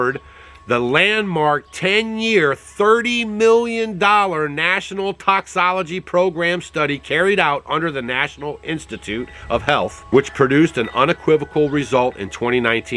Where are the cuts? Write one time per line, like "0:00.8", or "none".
0:10.0